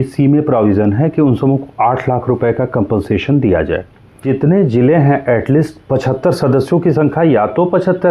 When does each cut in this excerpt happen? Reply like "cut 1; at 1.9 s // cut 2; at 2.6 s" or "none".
cut 1; at 4.2 s